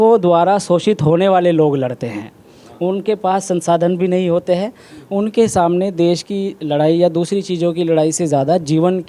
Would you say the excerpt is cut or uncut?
uncut